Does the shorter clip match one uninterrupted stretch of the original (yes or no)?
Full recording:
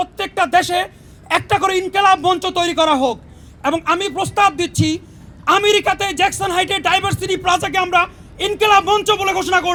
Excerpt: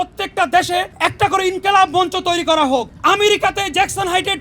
no